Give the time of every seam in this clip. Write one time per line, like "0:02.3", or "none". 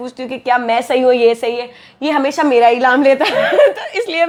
none